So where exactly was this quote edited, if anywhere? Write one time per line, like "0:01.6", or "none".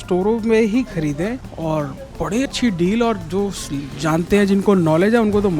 0:01.5
0:02.5